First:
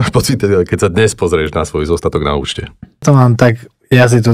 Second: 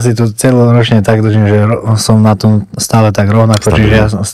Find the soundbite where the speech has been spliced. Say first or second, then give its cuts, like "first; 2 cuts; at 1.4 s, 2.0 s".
first; 1 cut; at 3.0 s